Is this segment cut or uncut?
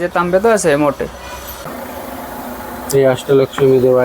cut